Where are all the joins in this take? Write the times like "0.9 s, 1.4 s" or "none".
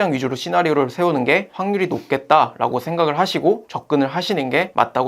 3.7 s